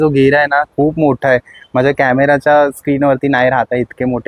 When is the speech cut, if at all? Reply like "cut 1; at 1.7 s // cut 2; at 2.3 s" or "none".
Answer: none